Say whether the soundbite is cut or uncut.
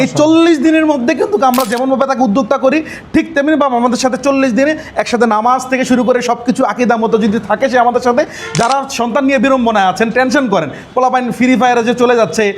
uncut